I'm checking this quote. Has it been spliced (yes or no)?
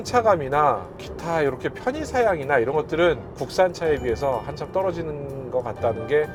no